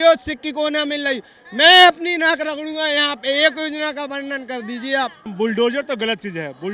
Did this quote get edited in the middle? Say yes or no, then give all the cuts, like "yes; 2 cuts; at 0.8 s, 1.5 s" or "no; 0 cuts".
yes; 1 cut; at 5.3 s